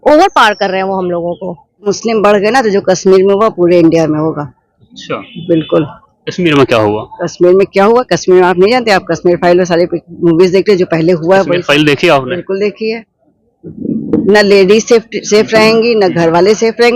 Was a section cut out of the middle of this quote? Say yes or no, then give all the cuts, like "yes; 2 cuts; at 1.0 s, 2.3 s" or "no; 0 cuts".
yes; 1 cut; at 1.9 s